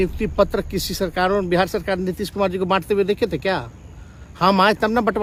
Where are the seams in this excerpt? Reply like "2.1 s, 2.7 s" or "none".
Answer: none